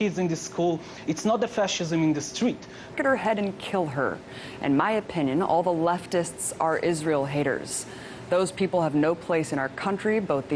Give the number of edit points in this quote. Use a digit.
0